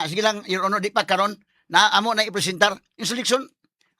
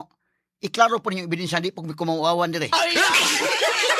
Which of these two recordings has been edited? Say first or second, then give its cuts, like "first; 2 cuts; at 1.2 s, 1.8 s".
first; 1 cut; at 2.9 s